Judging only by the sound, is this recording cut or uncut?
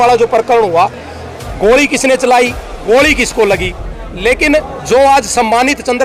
uncut